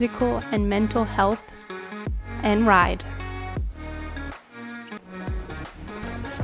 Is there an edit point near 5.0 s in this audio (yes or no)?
yes